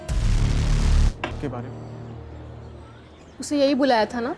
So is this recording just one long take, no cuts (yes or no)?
no